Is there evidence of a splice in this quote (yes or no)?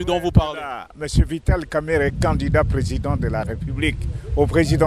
yes